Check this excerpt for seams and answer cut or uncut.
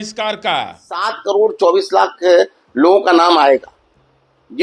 cut